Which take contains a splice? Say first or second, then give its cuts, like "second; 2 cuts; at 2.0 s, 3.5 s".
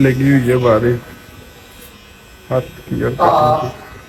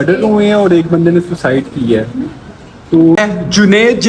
second; 1 cut; at 3.2 s